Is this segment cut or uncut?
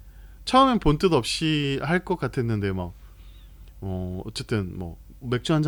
uncut